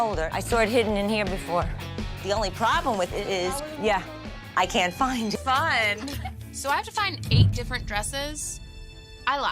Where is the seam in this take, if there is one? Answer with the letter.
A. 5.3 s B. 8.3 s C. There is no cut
A